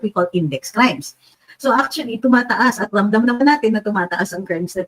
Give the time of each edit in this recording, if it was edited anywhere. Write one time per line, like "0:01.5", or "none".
0:01.3